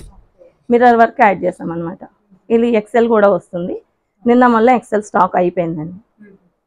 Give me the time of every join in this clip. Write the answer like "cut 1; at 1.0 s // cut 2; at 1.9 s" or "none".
none